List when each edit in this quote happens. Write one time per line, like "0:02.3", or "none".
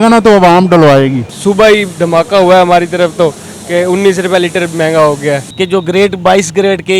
0:01.3
0:05.5

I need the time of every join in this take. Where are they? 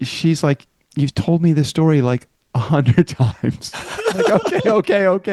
none

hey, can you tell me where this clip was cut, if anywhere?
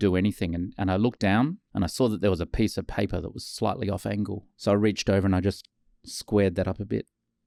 none

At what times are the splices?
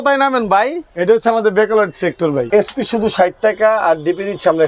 0:02.5

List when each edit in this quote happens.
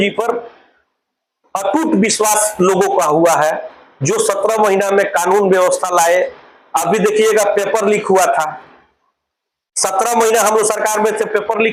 none

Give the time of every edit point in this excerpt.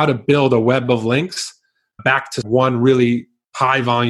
0:02.4

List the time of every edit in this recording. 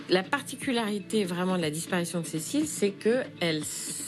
none

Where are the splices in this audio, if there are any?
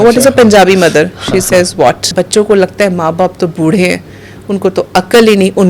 0:02.1

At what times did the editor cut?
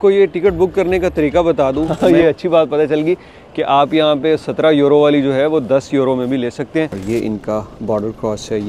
0:01.9
0:07.0

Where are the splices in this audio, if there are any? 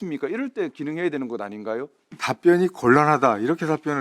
0:02.0

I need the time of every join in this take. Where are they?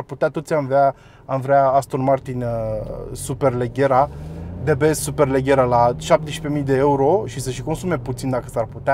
none

